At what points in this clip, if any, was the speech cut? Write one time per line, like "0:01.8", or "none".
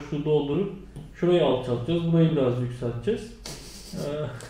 none